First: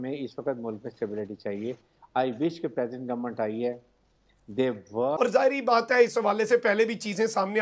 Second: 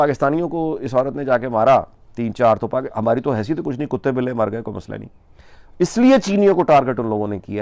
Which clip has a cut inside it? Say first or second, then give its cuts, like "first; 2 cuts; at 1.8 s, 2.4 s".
first; 1 cut; at 5.1 s